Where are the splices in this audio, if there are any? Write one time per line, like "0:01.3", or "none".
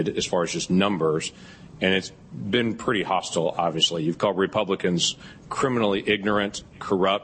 none